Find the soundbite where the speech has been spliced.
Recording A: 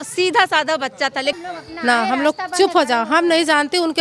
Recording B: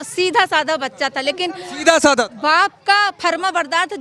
A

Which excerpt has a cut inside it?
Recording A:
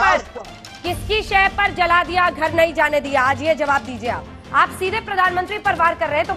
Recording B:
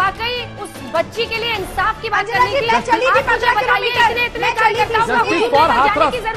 A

